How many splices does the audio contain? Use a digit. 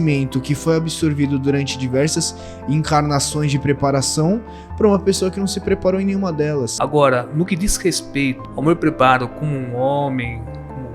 2